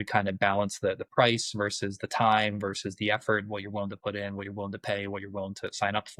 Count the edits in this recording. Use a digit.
0